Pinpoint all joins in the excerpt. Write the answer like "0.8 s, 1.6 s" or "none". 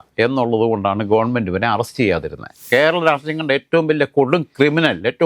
2.6 s